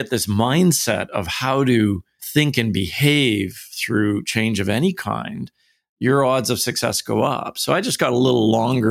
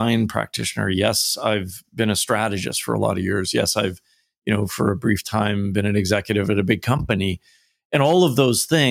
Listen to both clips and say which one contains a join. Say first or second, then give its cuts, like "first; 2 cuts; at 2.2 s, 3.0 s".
first; 1 cut; at 2.2 s